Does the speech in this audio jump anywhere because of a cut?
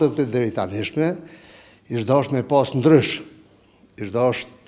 no; 0 cuts

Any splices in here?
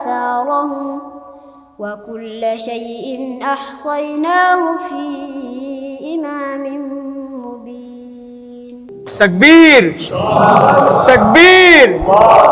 yes; 1 cut; at 9.0 s

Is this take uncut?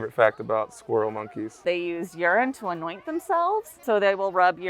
no; 2 cuts; at 1.6 s, 3.8 s

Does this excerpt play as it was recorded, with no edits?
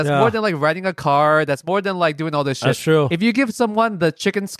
yes; 0 cuts

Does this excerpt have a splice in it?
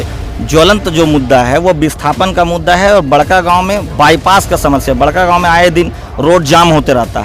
no; 0 cuts

